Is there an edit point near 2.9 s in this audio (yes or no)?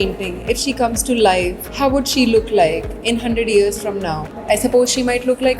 no